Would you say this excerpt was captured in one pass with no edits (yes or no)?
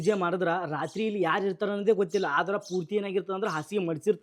yes